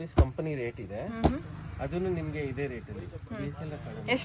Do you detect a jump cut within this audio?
no; 0 cuts

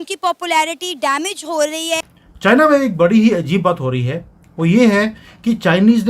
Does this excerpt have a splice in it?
yes; 1 cut; at 2.0 s

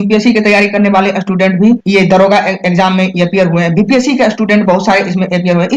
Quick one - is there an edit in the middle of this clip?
no; 0 cuts

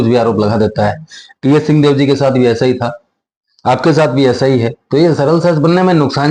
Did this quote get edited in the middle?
no; 0 cuts

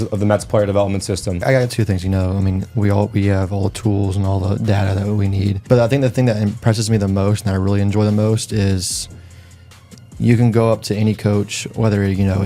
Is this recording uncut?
no; 2 cuts; at 1.4 s, 5.6 s

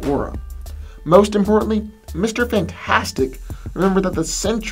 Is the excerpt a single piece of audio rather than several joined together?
no; 1 cut; at 1.3 s

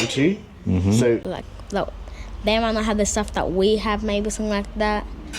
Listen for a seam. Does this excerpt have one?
yes; 1 cut; at 1.4 s

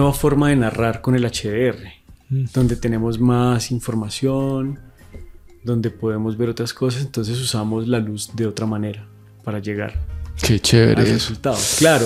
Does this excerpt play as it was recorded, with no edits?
yes; 0 cuts

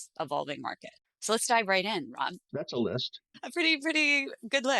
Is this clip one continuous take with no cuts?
no; 2 cuts; at 2.4 s, 3.2 s

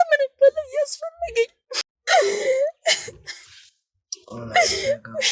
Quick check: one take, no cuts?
no; 1 cut; at 1.7 s

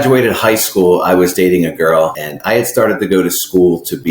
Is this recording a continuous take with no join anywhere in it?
no; 1 cut; at 2.3 s

